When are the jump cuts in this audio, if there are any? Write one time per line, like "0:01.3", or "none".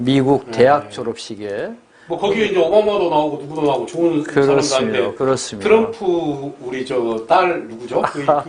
none